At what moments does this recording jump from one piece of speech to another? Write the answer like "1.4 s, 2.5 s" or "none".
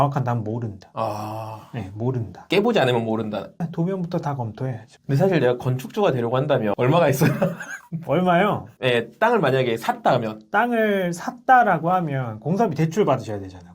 4.9 s, 6.7 s